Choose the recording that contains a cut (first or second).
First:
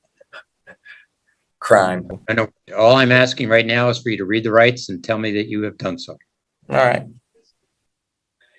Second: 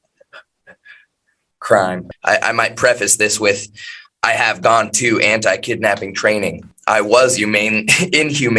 second